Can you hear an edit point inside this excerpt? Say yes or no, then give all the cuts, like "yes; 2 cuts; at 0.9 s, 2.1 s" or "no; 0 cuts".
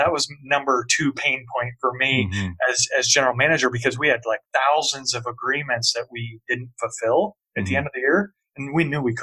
no; 0 cuts